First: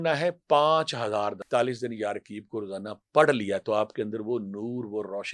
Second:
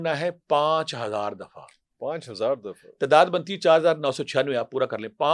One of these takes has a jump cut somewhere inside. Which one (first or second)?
first